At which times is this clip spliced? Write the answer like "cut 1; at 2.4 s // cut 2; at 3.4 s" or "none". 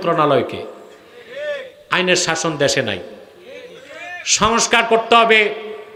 none

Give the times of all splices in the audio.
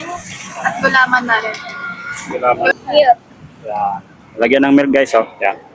cut 1; at 2.7 s

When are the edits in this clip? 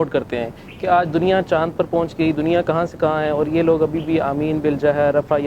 none

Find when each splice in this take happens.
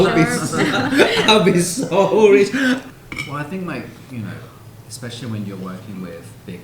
cut 1; at 2.8 s

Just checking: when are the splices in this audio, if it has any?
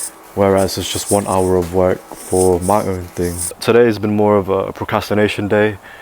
cut 1; at 3.6 s

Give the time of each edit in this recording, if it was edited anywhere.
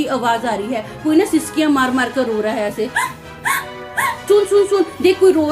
cut 1; at 4.1 s

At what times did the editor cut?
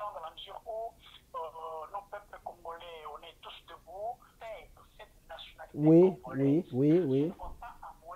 cut 1; at 4.3 s

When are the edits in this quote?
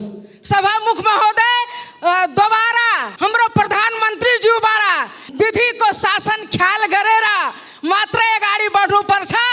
cut 1; at 3.0 s // cut 2; at 5.3 s

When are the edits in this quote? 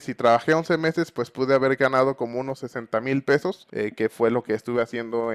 cut 1; at 3.6 s

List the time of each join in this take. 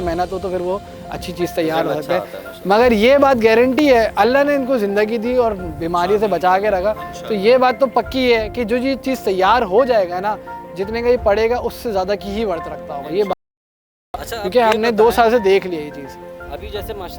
none

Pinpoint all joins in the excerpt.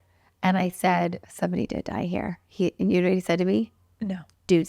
cut 1; at 1.2 s

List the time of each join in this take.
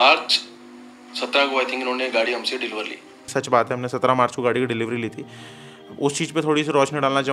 cut 1; at 3.2 s

